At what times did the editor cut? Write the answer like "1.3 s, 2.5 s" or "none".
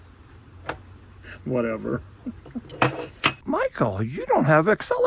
3.3 s